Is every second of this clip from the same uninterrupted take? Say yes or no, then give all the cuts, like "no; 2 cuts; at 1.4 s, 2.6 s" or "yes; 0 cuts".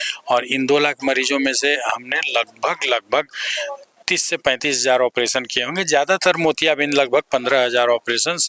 yes; 0 cuts